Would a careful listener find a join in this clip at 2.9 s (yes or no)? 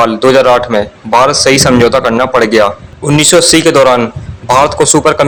no